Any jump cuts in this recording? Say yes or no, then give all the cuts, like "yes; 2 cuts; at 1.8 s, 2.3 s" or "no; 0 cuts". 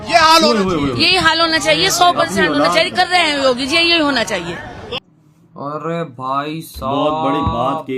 no; 0 cuts